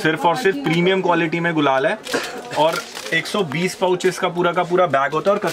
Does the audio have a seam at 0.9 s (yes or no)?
no